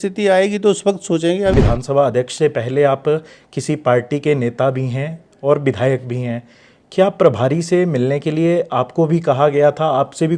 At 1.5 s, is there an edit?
yes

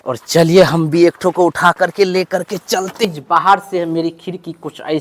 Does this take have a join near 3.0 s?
yes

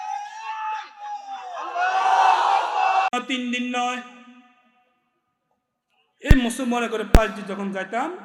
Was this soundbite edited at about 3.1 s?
yes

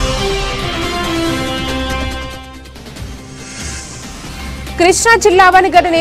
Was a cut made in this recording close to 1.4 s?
no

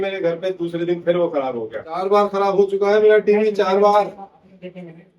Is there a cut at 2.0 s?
yes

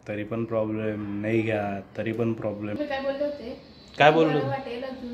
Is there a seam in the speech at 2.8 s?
yes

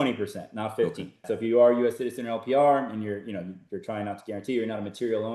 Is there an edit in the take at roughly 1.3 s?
yes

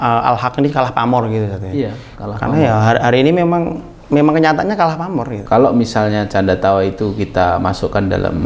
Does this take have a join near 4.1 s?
no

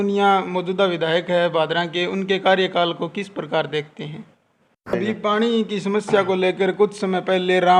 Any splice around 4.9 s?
yes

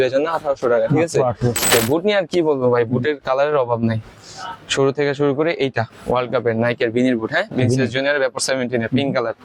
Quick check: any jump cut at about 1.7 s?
yes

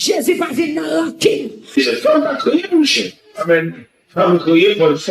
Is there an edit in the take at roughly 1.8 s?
yes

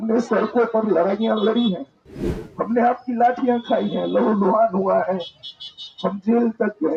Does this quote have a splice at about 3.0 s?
no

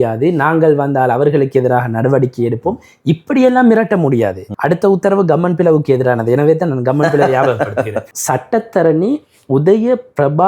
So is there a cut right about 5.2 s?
no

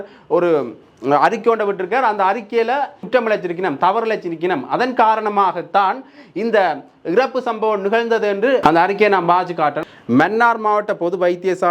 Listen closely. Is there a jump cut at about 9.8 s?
yes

